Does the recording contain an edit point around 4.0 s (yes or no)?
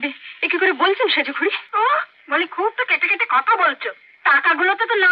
no